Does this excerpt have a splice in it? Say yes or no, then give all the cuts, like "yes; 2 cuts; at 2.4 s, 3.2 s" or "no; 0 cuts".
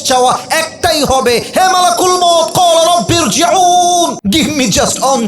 yes; 1 cut; at 4.2 s